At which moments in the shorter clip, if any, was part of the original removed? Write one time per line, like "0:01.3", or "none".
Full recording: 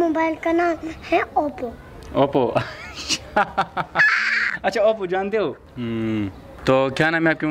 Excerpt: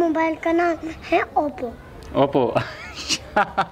none